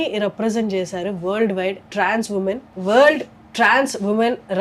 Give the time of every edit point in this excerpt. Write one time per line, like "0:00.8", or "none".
0:01.8
0:02.7